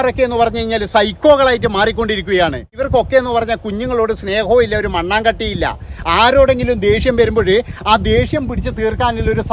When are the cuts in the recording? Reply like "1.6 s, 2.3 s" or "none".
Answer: 2.8 s